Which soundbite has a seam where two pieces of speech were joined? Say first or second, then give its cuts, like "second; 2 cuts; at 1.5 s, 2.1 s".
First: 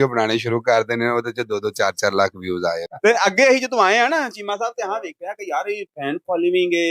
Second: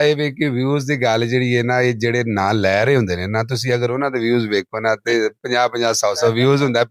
first; 1 cut; at 2.9 s